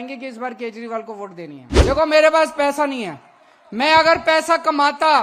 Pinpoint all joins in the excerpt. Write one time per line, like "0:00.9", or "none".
0:01.6